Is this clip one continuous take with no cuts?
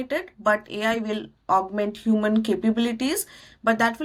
yes; 0 cuts

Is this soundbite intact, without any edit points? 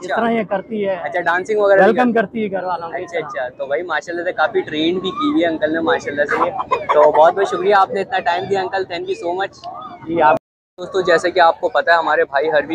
yes; 0 cuts

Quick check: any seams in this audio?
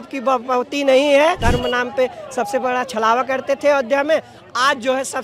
yes; 1 cut; at 1.4 s

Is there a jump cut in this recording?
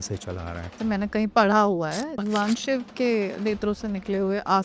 yes; 2 cuts; at 0.8 s, 2.1 s

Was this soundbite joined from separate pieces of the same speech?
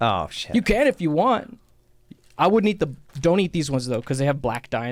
no; 0 cuts

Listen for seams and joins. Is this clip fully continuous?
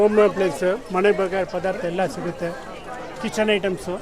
yes; 0 cuts

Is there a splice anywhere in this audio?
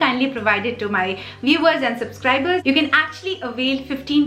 yes; 1 cut; at 2.6 s

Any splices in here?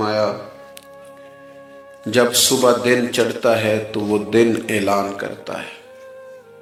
no; 0 cuts

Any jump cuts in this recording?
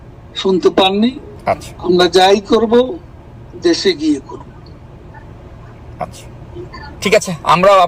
yes; 1 cut; at 1.3 s

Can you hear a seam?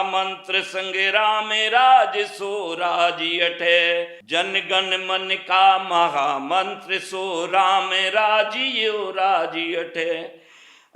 yes; 1 cut; at 4.2 s

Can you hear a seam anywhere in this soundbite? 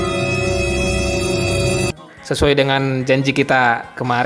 yes; 1 cut; at 1.9 s

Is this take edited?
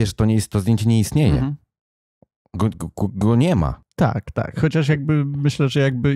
yes; 1 cut; at 3.8 s

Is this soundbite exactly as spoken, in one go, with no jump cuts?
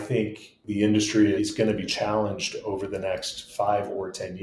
no; 1 cut; at 1.4 s

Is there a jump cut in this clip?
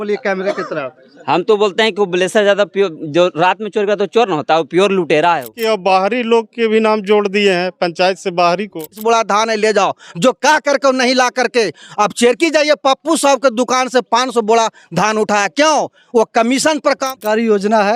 yes; 3 cuts; at 5.6 s, 8.8 s, 17.1 s

